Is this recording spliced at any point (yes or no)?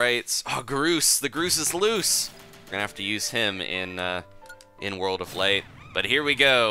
no